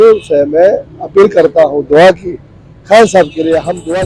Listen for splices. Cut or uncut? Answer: uncut